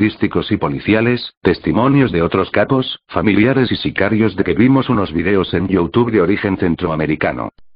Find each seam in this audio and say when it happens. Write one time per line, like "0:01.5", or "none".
none